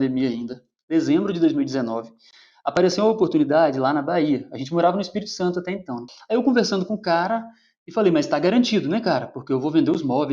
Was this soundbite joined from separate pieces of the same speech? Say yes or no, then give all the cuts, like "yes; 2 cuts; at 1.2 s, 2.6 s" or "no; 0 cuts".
yes; 1 cut; at 6.1 s